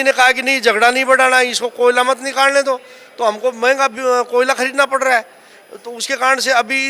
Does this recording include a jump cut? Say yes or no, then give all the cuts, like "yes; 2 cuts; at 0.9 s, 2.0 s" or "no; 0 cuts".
no; 0 cuts